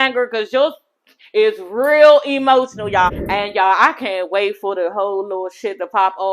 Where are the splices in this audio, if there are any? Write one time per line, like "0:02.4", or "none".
0:03.1